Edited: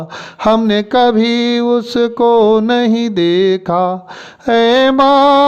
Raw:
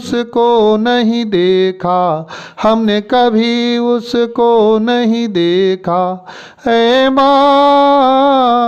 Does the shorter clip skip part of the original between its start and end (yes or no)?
no